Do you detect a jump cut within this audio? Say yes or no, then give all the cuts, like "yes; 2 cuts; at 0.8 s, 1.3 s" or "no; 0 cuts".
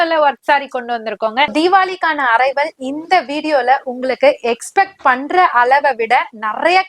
yes; 1 cut; at 1.5 s